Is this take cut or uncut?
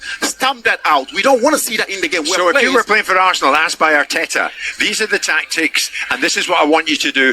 cut